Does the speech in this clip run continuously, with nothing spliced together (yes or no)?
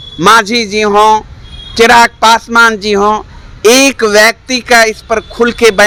yes